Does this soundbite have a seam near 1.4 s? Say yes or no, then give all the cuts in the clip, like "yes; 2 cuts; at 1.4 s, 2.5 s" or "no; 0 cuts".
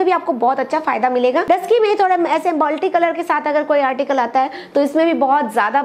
yes; 1 cut; at 1.4 s